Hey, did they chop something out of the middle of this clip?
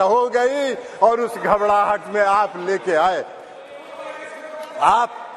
no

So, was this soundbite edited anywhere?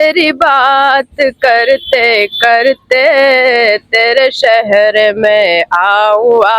no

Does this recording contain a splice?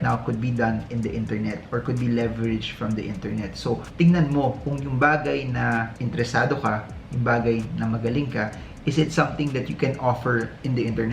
no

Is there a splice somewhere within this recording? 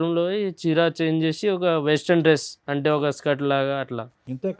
no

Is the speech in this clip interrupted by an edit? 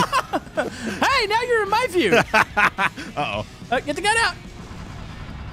no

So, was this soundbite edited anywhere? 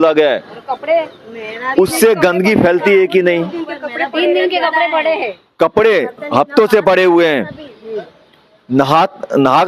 no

